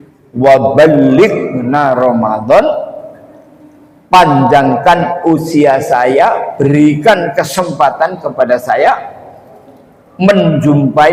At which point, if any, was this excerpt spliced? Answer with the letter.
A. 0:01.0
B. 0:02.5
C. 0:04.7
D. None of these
D